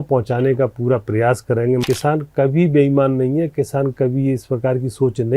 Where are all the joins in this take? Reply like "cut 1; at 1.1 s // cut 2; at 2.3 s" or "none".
cut 1; at 1.8 s